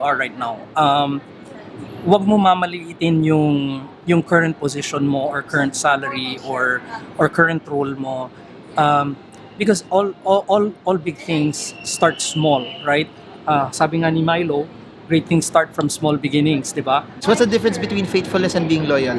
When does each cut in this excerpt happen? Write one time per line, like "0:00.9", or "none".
0:17.2